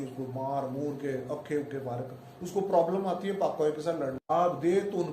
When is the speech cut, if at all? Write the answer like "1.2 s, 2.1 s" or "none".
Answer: 4.2 s